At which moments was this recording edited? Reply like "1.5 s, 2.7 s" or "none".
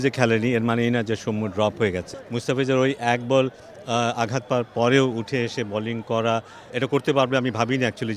2.2 s, 6.6 s